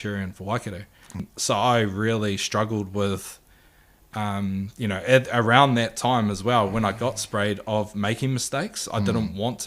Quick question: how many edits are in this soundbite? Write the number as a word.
one